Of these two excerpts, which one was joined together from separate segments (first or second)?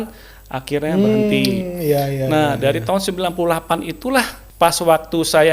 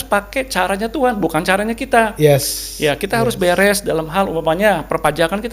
first